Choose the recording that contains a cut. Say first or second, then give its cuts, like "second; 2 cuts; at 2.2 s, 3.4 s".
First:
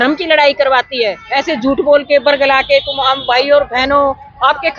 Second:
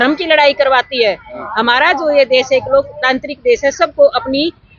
first; 1 cut; at 1.2 s